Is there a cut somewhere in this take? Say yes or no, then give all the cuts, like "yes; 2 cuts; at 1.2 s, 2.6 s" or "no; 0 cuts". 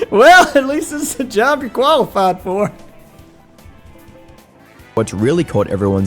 yes; 1 cut; at 5.0 s